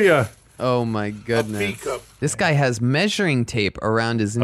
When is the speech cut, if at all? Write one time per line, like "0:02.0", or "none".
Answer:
0:02.1